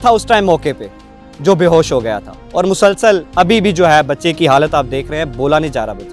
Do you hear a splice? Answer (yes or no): yes